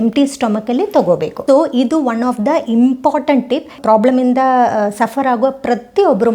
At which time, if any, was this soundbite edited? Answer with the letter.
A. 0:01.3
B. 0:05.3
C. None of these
A